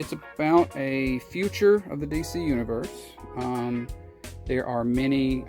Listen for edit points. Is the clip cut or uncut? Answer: uncut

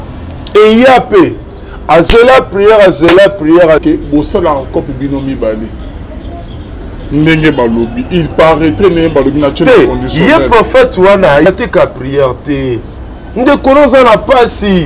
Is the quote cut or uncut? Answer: cut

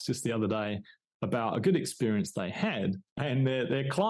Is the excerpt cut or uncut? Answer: cut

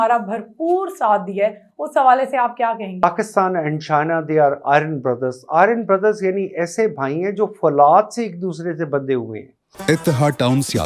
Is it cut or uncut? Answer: cut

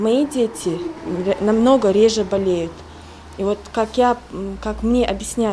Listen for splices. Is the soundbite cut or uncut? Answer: uncut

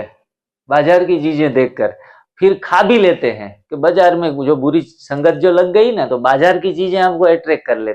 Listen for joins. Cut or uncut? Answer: uncut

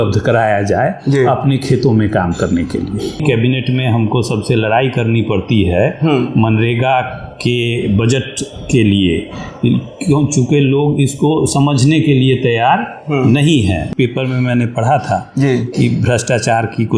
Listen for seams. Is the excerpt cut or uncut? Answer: cut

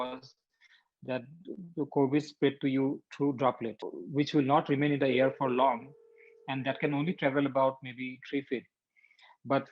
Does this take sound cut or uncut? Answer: cut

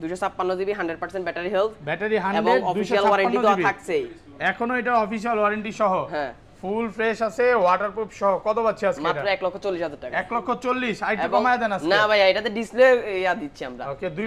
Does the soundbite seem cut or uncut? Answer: uncut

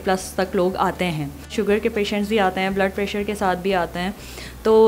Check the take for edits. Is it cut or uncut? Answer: uncut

